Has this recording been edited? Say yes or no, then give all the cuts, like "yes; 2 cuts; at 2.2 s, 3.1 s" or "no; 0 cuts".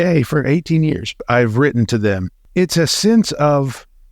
yes; 2 cuts; at 1.2 s, 2.3 s